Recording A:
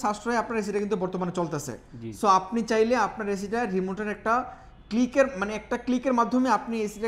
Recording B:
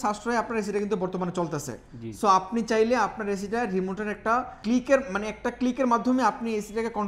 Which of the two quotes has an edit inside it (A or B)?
B